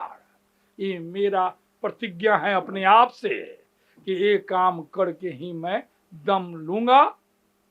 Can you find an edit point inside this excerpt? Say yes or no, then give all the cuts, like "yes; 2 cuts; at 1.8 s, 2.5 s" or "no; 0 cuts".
no; 0 cuts